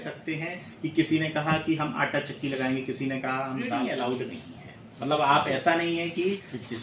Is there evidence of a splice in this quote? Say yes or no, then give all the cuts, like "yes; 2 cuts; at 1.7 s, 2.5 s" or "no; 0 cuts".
yes; 1 cut; at 3.7 s